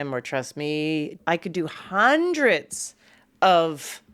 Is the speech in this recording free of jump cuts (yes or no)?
no